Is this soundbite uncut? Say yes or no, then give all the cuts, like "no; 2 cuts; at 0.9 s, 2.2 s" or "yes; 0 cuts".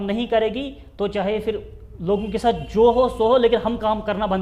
yes; 0 cuts